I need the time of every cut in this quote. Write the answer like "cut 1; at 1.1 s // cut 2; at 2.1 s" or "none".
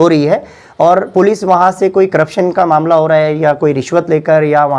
none